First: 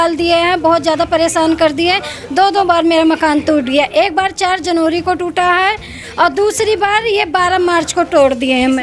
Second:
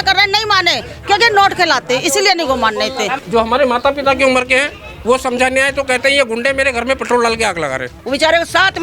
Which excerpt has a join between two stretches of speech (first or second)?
second